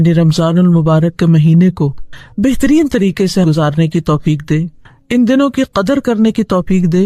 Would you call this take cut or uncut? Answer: uncut